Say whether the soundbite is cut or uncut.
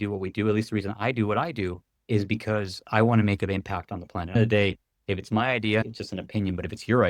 cut